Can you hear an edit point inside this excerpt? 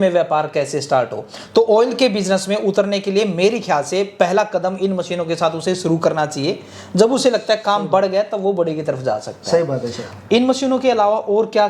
no; 0 cuts

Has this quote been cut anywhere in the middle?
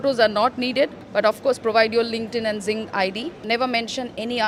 no; 0 cuts

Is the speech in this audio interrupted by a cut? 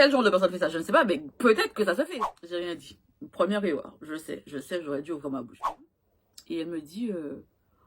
yes; 2 cuts; at 2.1 s, 5.7 s

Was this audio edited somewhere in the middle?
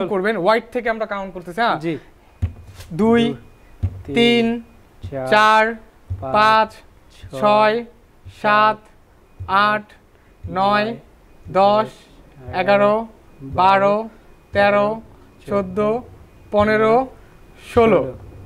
no; 0 cuts

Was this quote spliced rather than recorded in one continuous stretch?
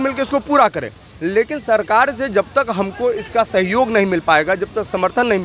no; 0 cuts

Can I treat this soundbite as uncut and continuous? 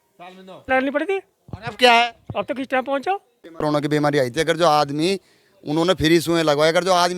no; 1 cut; at 3.6 s

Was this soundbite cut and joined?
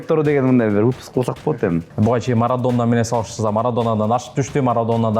yes; 1 cut; at 1.9 s

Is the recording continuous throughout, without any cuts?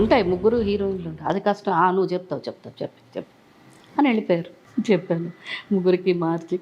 no; 1 cut; at 4.6 s

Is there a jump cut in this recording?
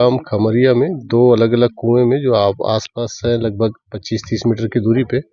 no; 0 cuts

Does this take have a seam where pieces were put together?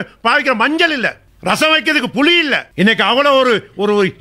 yes; 2 cuts; at 1.3 s, 2.7 s

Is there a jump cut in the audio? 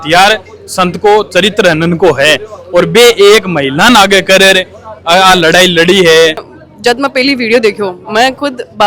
yes; 1 cut; at 6.5 s

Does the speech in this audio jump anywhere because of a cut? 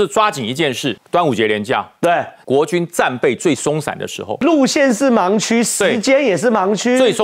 yes; 3 cuts; at 1.0 s, 2.3 s, 4.4 s

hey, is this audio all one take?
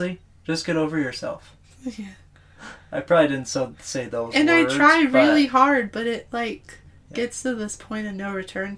yes; 0 cuts

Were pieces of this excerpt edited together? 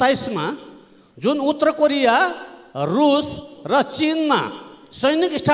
no; 0 cuts

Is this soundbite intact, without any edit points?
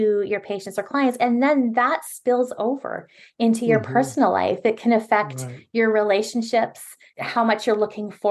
no; 1 cut; at 7.0 s

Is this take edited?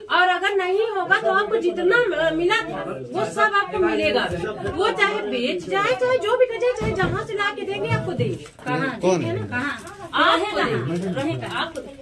no; 0 cuts

